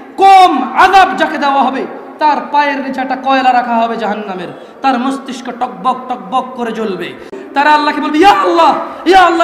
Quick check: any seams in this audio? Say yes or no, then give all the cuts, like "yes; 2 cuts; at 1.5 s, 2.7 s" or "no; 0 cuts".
yes; 1 cut; at 7.3 s